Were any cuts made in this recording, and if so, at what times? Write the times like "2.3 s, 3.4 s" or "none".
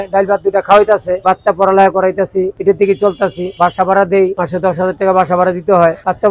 none